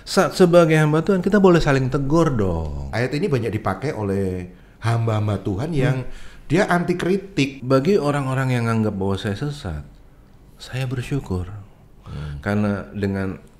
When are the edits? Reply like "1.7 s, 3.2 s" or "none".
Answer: 2.9 s, 7.6 s